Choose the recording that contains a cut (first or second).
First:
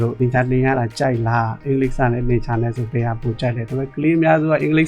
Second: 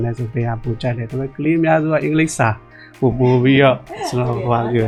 first